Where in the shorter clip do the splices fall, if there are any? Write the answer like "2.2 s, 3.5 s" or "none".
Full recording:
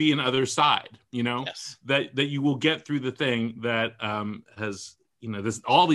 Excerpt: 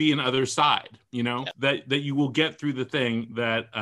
1.5 s